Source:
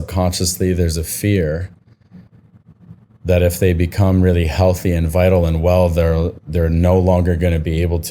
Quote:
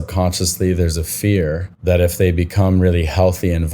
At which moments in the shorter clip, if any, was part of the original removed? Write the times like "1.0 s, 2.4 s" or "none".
1.7 s